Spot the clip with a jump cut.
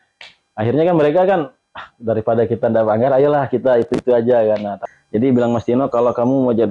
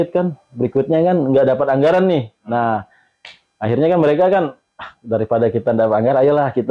first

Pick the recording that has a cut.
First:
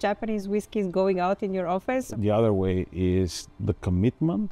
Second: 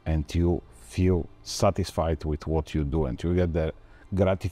first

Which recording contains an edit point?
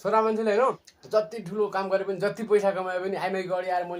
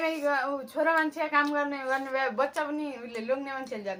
first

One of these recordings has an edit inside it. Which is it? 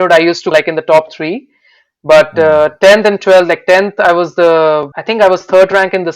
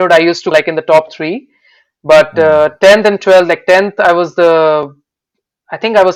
first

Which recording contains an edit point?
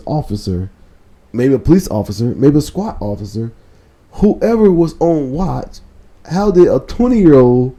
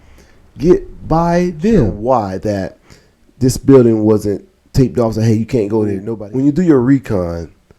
second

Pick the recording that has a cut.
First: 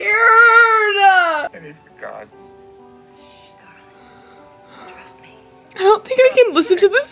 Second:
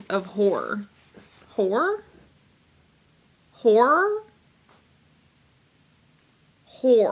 first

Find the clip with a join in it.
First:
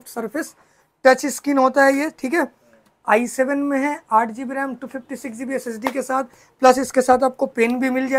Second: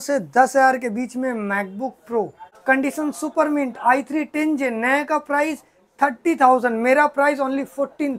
second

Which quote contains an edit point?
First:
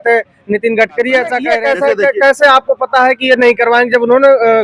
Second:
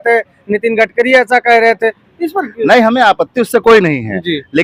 first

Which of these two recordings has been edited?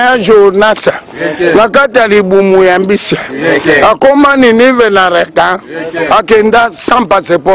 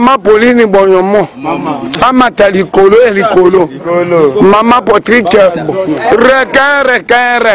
second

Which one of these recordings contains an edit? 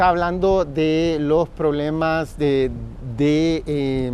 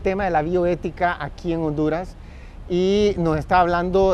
second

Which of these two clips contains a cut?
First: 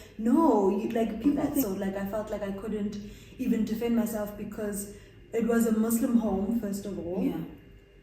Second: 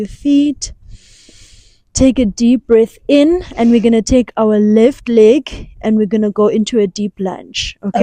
first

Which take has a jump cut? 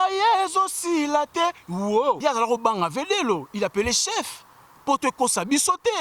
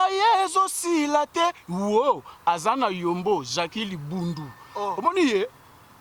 first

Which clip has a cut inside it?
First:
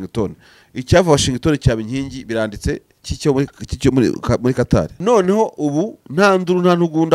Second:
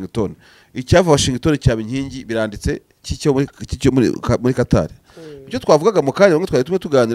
first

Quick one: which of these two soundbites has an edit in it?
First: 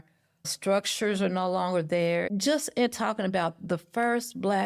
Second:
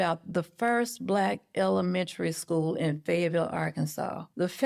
first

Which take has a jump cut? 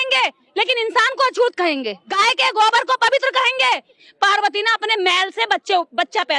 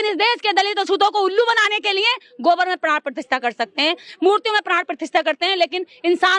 first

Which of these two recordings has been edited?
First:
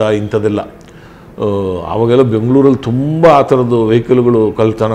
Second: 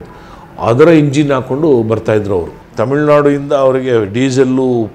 second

